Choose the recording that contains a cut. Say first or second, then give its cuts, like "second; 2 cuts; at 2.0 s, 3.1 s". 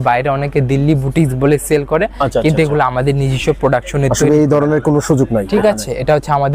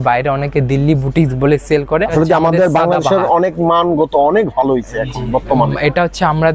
second; 1 cut; at 2.1 s